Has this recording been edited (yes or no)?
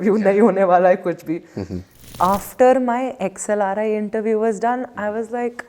yes